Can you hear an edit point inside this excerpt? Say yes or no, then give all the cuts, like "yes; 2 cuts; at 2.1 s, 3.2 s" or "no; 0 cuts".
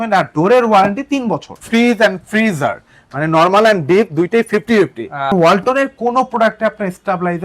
yes; 2 cuts; at 1.6 s, 5.3 s